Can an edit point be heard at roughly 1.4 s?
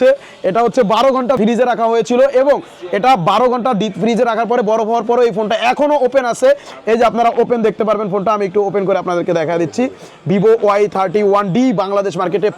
yes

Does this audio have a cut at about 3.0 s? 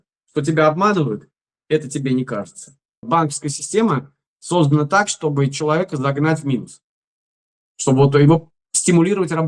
yes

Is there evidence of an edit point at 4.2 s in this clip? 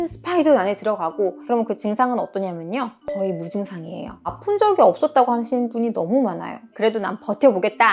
no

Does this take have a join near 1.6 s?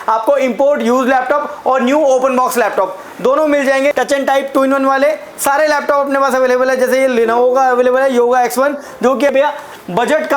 no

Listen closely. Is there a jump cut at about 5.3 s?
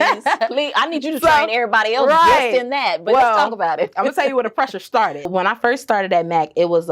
yes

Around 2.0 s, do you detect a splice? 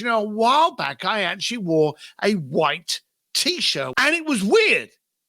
no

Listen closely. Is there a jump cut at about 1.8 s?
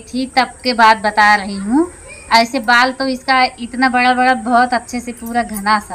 no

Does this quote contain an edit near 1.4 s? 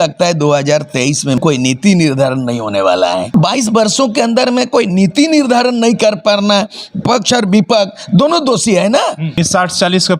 yes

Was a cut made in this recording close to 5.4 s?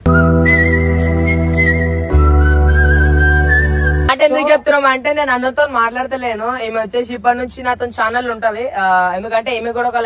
no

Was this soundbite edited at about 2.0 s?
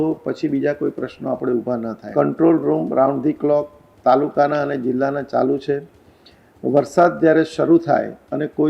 yes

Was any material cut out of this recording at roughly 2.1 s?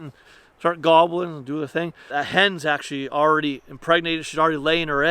yes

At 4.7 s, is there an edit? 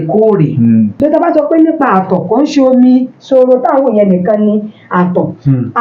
no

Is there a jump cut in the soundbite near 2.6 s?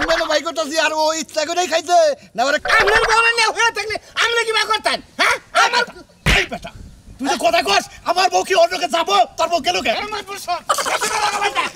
yes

